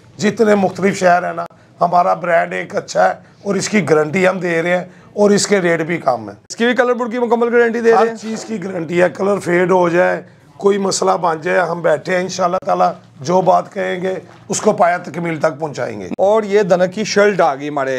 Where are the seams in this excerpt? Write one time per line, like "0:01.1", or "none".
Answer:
0:06.5
0:15.9